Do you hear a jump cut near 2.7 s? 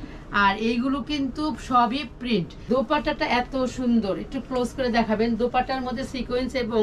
yes; 1 cut; at 2.7 s

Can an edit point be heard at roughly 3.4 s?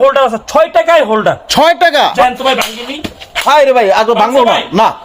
no; 1 cut; at 2.2 s

